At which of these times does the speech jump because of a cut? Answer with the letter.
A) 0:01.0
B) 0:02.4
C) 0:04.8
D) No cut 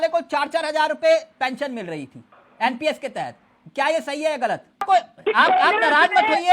C